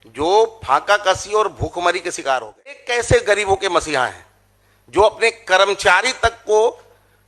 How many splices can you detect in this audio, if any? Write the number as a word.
one